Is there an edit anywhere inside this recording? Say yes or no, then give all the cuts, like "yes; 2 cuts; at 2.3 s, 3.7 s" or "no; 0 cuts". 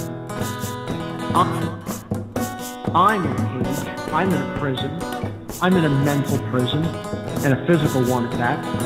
yes; 1 cut; at 1.0 s